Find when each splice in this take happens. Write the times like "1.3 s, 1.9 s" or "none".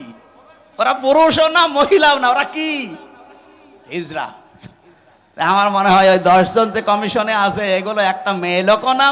none